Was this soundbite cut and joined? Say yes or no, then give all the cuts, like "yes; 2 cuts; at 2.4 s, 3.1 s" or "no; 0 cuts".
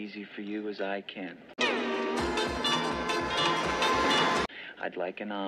no; 0 cuts